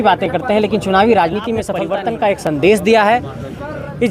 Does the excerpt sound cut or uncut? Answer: cut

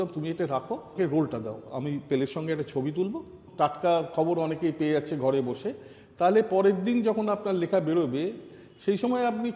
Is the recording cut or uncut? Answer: cut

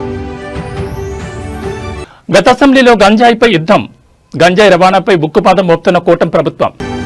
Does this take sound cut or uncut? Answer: uncut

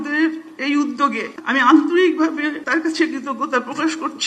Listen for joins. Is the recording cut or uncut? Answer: cut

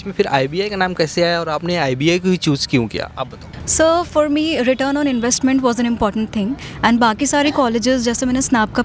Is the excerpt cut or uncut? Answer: uncut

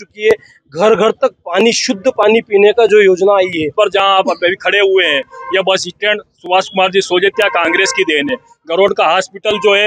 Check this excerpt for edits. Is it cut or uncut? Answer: cut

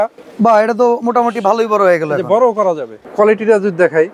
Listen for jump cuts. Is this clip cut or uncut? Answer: cut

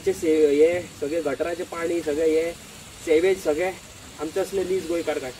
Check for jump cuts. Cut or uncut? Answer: uncut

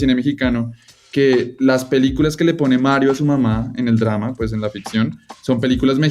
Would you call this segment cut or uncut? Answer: uncut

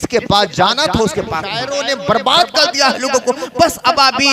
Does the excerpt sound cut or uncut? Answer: cut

